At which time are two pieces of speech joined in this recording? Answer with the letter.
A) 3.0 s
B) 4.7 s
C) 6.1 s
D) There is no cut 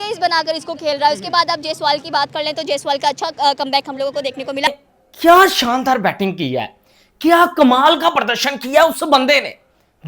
B